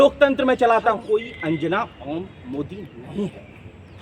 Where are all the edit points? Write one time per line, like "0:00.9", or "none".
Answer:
0:01.0